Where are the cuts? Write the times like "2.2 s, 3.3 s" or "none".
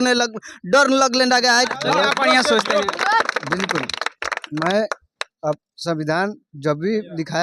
1.7 s